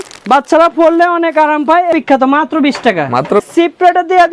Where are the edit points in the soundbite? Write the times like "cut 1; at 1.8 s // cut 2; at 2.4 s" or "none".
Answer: cut 1; at 1.9 s // cut 2; at 3.4 s